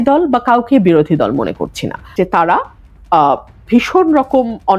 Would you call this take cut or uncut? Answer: cut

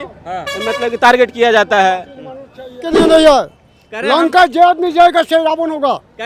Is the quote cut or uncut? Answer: cut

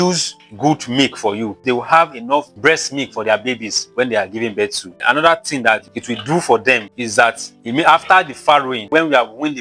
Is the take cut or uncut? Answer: cut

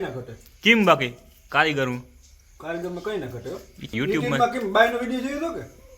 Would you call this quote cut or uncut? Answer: cut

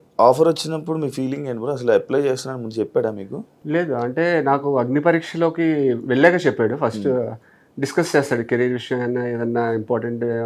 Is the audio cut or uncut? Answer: uncut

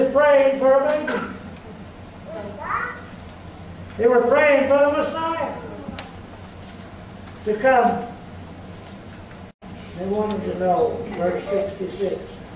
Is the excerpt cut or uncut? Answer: cut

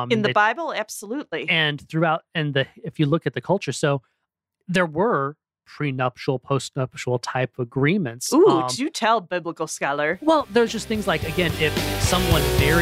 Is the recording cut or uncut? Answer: uncut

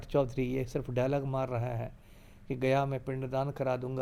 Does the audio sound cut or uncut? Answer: uncut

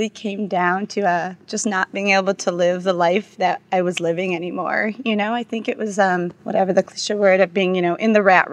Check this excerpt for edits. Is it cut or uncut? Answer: uncut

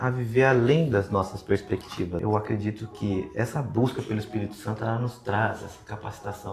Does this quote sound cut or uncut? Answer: cut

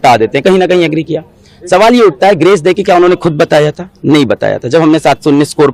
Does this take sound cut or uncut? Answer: uncut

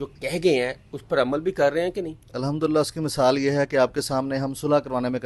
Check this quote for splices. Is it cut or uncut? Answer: uncut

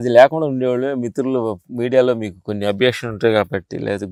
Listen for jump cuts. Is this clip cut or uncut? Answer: uncut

